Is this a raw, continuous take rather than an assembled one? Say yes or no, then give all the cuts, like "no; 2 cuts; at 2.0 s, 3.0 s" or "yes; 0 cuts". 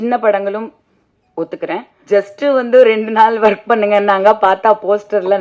no; 1 cut; at 1.9 s